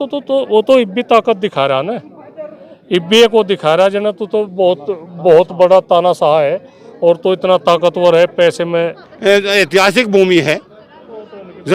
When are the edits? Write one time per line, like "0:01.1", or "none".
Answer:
0:09.0